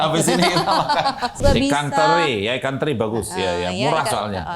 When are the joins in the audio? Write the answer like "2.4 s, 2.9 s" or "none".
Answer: 1.4 s